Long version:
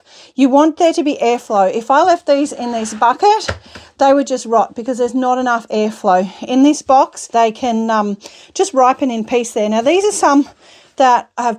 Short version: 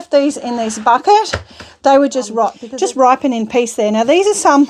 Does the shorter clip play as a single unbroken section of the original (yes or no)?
no